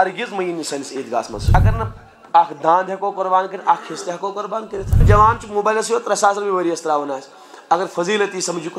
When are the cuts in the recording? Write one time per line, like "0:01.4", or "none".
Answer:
0:01.6
0:05.0